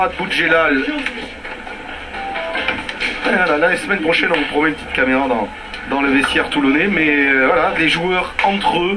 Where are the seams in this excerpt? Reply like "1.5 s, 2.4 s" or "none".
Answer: none